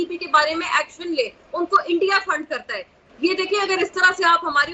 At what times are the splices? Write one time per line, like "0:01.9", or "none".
0:02.9